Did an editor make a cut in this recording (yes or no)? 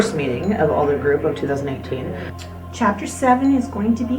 yes